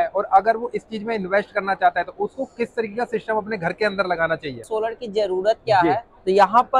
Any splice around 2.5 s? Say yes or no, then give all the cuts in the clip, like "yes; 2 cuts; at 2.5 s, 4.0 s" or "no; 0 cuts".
no; 1 cut; at 4.6 s